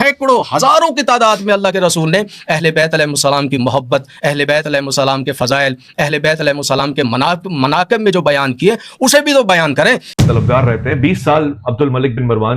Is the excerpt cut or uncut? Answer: cut